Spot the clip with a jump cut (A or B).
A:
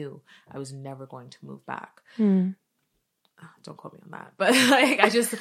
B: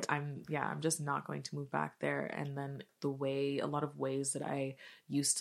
B